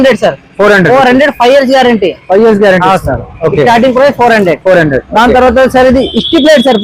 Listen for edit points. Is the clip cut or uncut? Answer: uncut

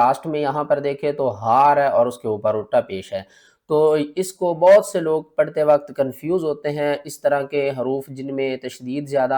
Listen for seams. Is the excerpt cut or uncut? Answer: uncut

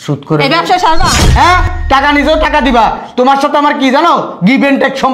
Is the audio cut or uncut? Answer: cut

